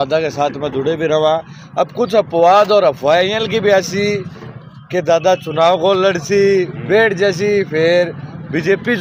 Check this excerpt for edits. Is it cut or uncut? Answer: uncut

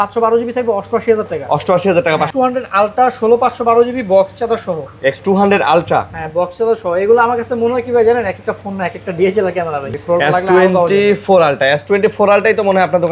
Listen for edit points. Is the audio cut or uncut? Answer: cut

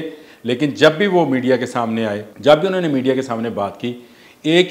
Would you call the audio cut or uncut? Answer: cut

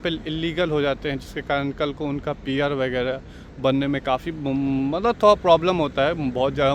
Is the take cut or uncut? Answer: uncut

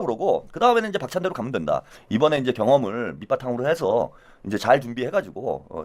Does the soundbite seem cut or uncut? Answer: cut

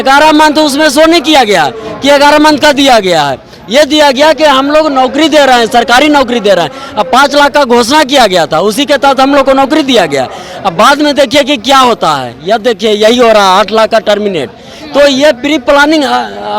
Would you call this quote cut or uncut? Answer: uncut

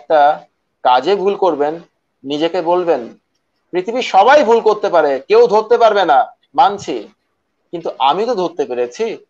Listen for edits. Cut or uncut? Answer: uncut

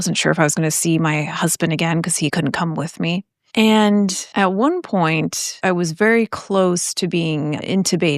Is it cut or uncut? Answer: cut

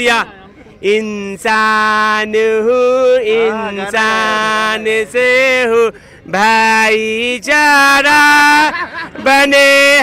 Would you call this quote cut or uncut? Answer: uncut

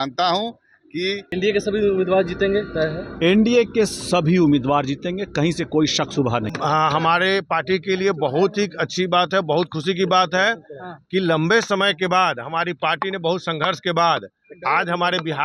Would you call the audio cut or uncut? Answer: cut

